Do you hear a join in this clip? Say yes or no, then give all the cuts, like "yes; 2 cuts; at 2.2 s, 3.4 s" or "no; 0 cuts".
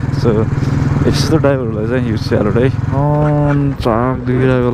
yes; 1 cut; at 2.8 s